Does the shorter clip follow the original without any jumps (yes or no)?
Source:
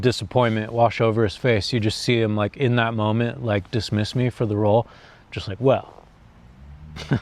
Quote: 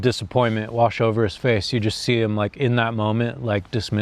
yes